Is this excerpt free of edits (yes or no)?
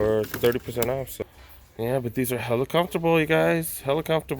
no